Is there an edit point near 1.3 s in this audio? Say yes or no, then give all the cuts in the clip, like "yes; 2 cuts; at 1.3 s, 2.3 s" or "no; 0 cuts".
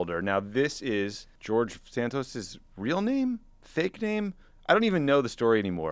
yes; 1 cut; at 1.3 s